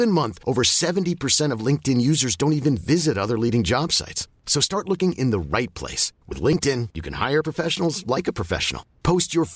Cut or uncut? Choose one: uncut